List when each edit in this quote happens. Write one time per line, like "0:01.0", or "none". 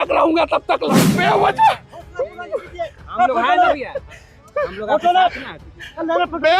0:01.0